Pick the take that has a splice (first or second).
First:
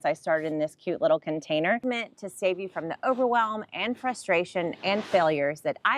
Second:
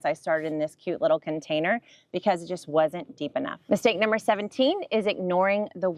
first